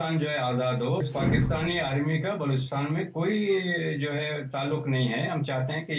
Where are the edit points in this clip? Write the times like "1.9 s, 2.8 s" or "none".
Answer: 1.0 s